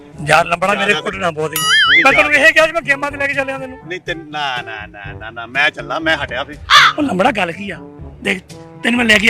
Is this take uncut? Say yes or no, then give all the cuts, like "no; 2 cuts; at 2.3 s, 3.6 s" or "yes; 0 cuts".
yes; 0 cuts